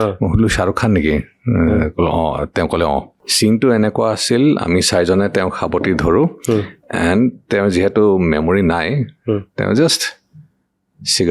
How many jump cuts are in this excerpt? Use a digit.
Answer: 1